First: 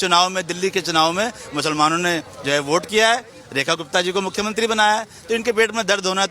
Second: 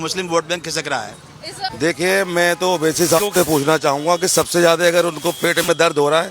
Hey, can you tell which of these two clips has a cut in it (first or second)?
second